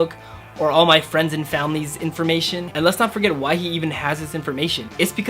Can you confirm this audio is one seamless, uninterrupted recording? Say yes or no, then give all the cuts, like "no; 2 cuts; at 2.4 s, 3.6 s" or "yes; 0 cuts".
no; 1 cut; at 2.7 s